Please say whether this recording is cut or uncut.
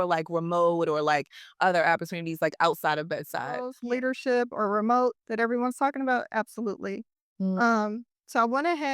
cut